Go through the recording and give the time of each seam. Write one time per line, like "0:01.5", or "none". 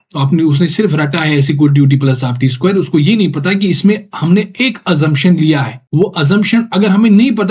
0:05.8

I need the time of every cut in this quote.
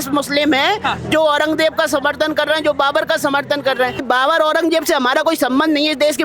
0:04.0

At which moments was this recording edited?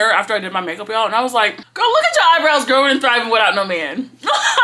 0:01.6

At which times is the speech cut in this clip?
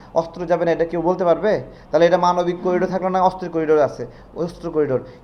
none

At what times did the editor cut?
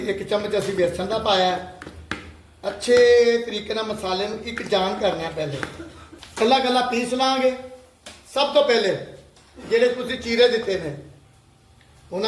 none

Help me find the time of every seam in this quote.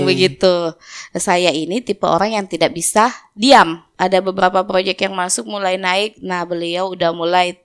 0:03.8

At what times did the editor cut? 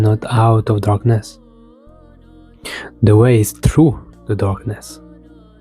0:01.2
0:02.6

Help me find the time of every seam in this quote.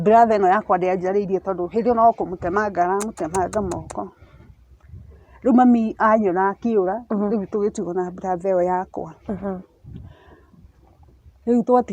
none

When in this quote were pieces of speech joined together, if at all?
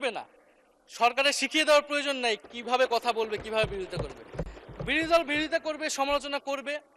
none

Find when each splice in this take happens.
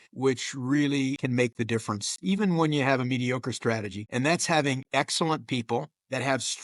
0:04.0

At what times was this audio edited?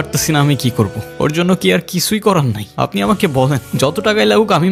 none

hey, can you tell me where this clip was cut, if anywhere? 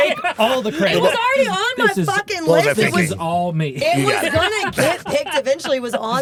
none

